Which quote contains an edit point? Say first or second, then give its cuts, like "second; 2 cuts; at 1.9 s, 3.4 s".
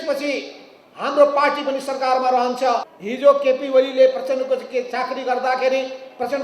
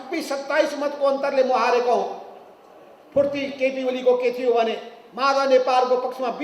first; 1 cut; at 2.9 s